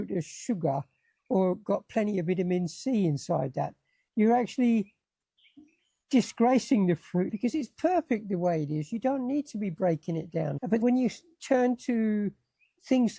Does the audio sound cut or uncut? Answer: cut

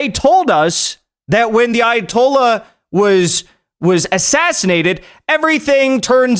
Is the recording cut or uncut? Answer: uncut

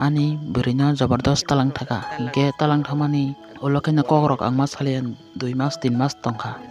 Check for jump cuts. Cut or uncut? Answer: uncut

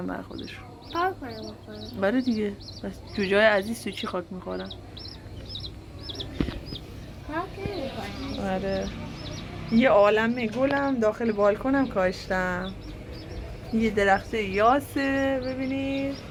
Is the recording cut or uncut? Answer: uncut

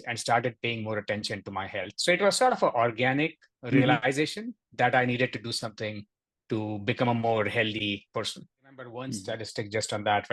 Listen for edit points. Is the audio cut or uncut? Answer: cut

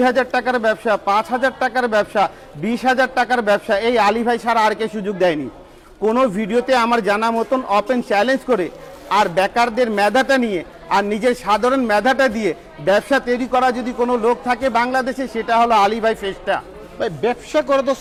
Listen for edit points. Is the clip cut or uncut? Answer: uncut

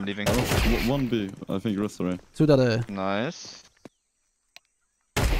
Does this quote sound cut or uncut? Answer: cut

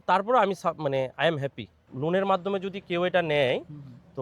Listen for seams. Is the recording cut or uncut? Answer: cut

